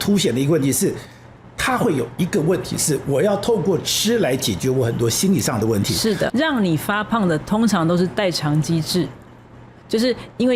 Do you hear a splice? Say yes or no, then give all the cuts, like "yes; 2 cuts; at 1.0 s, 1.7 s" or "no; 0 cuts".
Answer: yes; 1 cut; at 6.3 s